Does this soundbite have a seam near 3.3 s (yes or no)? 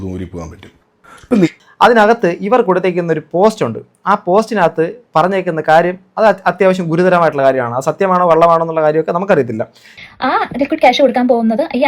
no